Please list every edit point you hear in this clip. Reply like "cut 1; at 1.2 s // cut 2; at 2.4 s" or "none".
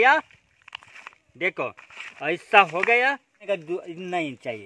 cut 1; at 3.4 s